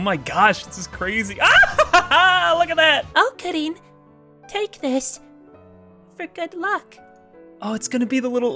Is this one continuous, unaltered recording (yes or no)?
no